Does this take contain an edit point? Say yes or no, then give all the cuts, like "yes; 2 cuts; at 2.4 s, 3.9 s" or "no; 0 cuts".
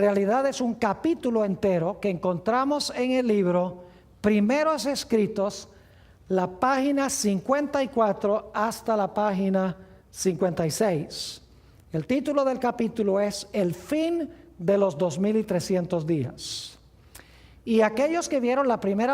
yes; 1 cut; at 1.5 s